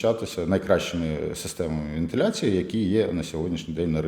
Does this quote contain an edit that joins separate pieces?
no; 0 cuts

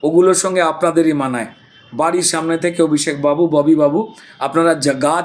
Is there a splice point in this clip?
no; 0 cuts

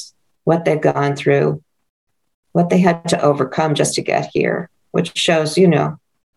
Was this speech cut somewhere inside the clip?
no; 0 cuts

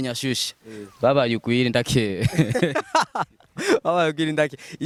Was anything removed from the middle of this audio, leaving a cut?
no; 0 cuts

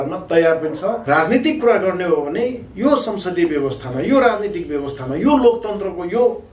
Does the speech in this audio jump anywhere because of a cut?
yes; 1 cut; at 1.0 s

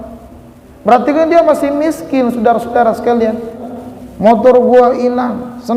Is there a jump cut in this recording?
yes; 1 cut; at 3.7 s

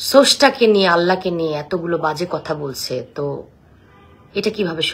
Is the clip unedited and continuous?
yes; 0 cuts

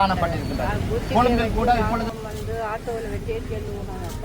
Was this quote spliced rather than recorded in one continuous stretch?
yes; 1 cut; at 2.1 s

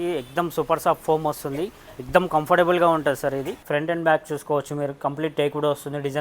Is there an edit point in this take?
yes; 1 cut; at 3.5 s

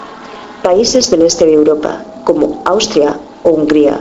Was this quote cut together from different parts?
yes; 1 cut; at 2.2 s

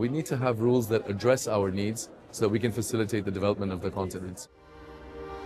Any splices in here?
yes; 1 cut; at 4.4 s

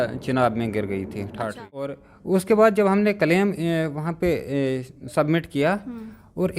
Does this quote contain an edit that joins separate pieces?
yes; 1 cut; at 1.9 s

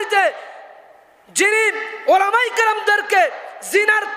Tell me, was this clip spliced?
no; 0 cuts

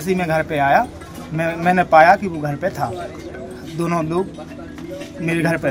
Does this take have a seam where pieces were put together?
no; 0 cuts

